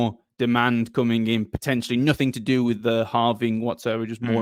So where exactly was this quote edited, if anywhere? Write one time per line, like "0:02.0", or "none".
none